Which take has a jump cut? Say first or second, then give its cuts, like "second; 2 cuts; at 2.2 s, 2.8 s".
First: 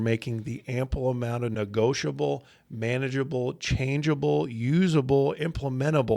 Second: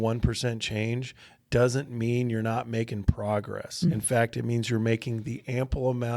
second; 1 cut; at 3.9 s